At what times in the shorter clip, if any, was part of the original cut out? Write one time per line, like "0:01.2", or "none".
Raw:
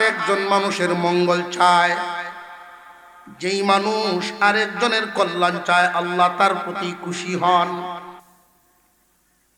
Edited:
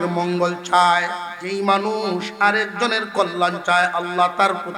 0:01.3